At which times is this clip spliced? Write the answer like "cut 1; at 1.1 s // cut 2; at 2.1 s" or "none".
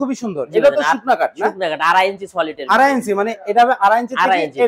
none